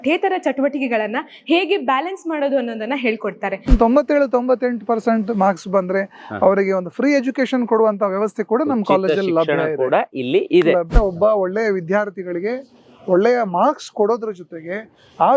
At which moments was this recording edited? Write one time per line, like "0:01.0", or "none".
0:03.7
0:10.8